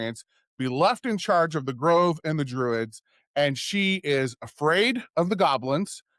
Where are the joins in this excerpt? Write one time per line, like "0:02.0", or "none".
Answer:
none

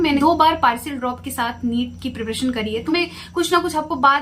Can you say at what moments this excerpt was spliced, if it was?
0:02.8

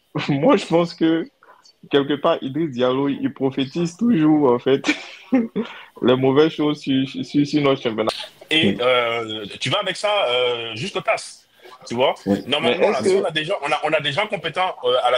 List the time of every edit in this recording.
0:08.1

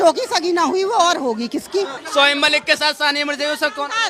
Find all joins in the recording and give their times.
0:02.0

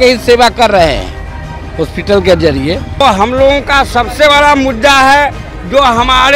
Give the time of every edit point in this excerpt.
0:03.0

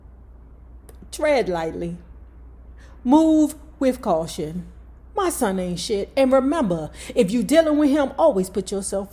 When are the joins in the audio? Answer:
none

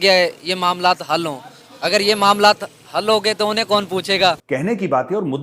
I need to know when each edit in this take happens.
0:04.4

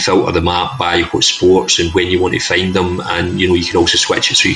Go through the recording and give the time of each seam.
none

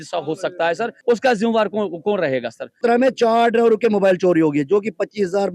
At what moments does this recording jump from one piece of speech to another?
0:01.0
0:02.7

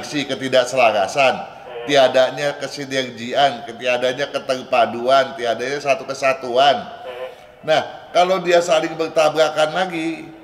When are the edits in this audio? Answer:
none

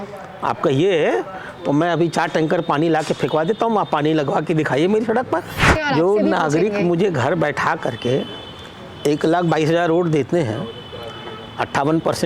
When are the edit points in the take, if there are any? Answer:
0:05.8

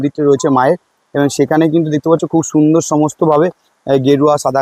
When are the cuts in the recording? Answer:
none

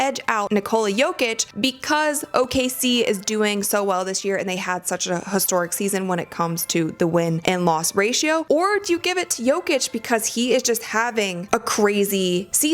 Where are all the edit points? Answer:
0:01.4
0:07.4

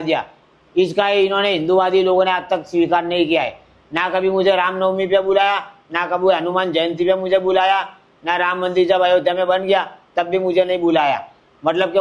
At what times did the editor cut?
none

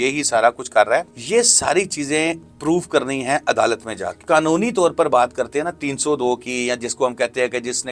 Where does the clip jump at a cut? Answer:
0:01.2
0:04.2

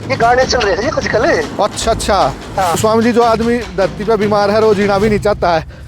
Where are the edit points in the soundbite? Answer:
0:02.7

